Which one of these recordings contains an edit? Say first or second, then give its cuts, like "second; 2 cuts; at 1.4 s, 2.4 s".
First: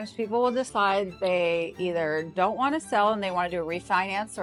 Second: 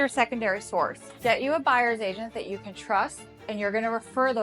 second; 1 cut; at 1.0 s